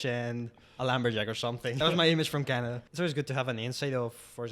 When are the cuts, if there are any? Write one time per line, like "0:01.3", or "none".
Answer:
0:01.8
0:02.8